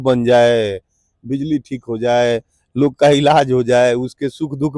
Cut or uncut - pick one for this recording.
uncut